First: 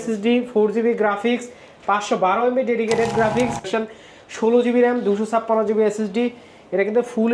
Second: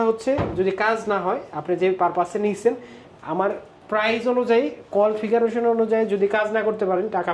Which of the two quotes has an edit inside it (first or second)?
first